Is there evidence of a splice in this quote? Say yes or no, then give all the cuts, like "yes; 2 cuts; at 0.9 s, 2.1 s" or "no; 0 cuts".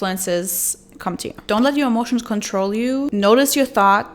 yes; 2 cuts; at 1.4 s, 3.1 s